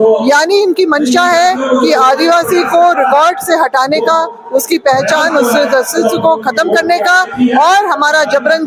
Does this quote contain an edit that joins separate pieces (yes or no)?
no